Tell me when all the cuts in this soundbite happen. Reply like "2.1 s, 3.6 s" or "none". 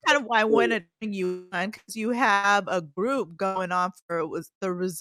none